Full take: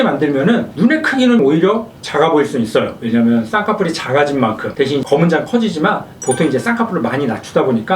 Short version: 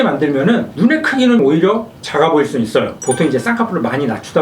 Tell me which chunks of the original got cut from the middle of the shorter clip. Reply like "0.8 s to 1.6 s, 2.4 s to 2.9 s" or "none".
2.9 s to 6.1 s